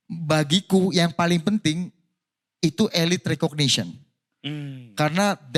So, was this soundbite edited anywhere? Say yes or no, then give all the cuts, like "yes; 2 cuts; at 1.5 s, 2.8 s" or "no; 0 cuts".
no; 0 cuts